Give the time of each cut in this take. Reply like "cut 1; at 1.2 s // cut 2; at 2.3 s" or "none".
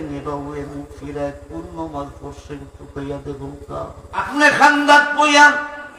cut 1; at 4.2 s